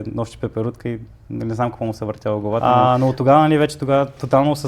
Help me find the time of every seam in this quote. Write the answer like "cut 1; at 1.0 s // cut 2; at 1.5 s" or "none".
cut 1; at 2.6 s